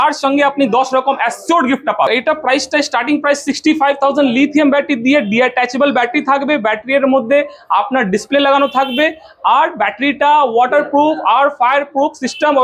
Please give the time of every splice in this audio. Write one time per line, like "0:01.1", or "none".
0:02.1

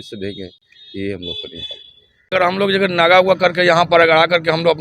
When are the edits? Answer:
0:02.3

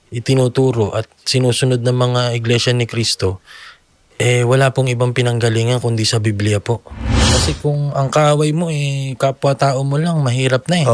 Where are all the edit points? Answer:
0:07.3

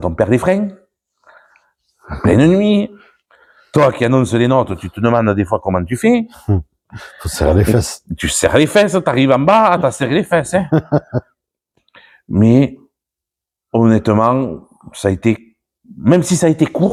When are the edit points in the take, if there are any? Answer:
none

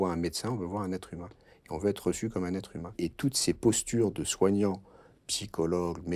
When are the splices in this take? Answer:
0:03.0

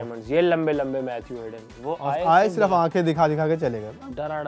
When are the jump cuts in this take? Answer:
none

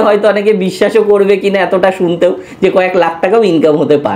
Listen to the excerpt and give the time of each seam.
none

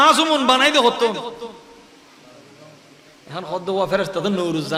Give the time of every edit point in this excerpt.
none

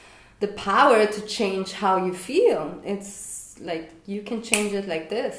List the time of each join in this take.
none

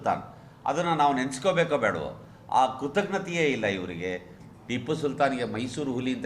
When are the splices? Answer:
0:04.4

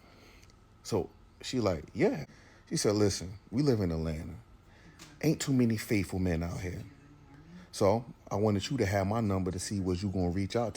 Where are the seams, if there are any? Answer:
0:02.3

